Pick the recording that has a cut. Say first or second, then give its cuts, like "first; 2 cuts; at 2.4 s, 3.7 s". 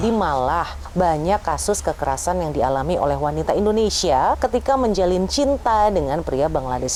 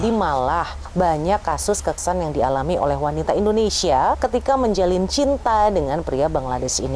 second; 1 cut; at 2.0 s